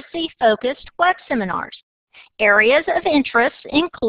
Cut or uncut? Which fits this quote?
cut